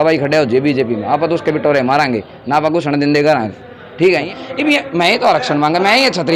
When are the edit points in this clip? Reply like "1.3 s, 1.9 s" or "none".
4.2 s